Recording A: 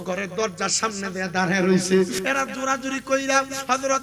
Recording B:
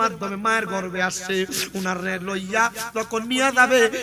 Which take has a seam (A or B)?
A